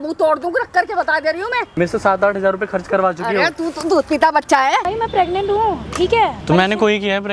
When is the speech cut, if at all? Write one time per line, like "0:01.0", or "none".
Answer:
0:01.7
0:04.9
0:06.4